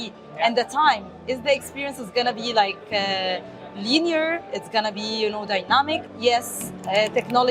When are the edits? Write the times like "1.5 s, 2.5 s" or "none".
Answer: 6.1 s